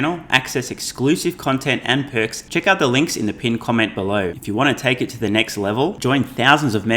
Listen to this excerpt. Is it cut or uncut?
cut